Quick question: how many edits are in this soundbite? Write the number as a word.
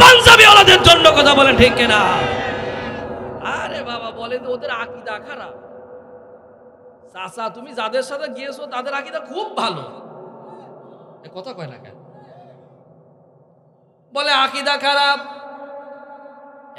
zero